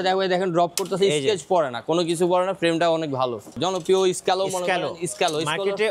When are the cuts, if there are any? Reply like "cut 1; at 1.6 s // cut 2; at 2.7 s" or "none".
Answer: cut 1; at 3.5 s

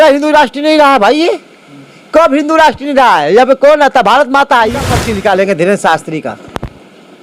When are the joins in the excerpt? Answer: cut 1; at 5.0 s

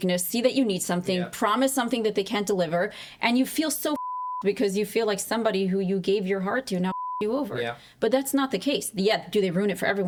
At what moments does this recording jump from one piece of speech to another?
none

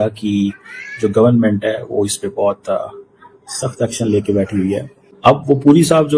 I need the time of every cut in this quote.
cut 1; at 5.0 s

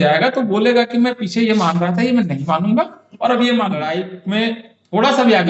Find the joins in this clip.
cut 1; at 4.1 s

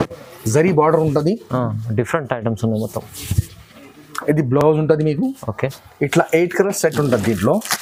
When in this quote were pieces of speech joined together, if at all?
none

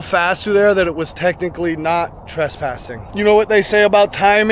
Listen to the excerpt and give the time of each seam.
cut 1; at 2.9 s

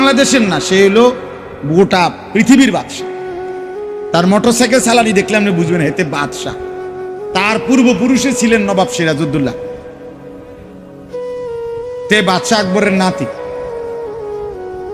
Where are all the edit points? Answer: cut 1; at 13.4 s

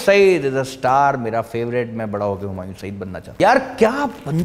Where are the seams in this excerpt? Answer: cut 1; at 3.4 s

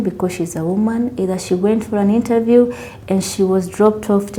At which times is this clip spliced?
none

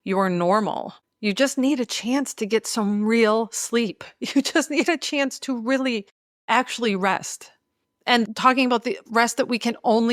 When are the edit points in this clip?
cut 1; at 8.2 s

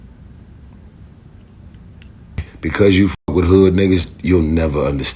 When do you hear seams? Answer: cut 1; at 2.4 s

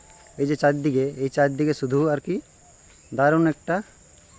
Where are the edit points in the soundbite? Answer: none

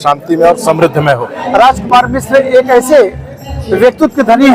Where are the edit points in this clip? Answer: cut 1; at 0.9 s

